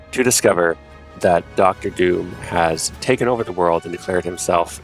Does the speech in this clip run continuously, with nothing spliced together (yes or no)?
no